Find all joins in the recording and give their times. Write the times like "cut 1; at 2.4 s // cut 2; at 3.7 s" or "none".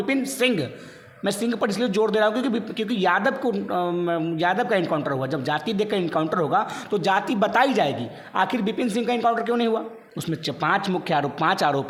none